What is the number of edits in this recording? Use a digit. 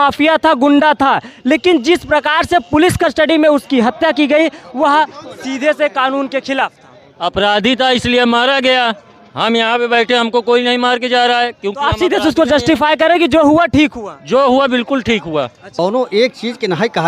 1